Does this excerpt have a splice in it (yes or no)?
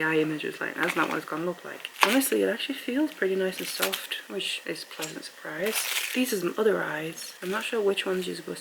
no